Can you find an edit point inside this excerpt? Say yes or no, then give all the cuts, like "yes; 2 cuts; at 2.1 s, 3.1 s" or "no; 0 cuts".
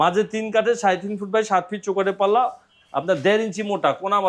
no; 0 cuts